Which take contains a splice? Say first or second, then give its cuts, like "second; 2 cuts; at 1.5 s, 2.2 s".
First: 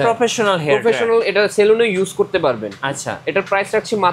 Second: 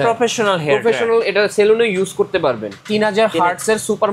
second; 1 cut; at 2.7 s